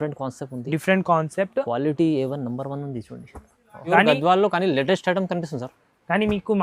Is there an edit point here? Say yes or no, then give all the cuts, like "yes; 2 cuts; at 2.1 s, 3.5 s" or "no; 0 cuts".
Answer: yes; 1 cut; at 3.9 s